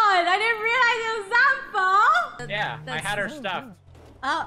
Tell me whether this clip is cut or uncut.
cut